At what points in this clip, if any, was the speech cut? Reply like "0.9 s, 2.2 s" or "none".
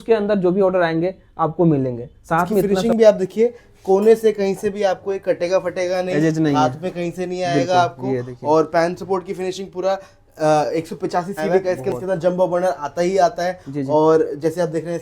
2.7 s, 11.8 s